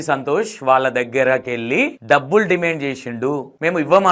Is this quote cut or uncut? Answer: uncut